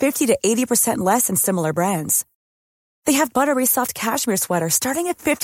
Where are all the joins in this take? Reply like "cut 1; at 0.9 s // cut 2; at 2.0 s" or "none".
none